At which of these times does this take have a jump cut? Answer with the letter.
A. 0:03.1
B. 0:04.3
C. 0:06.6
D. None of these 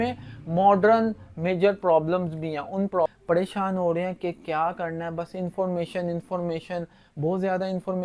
A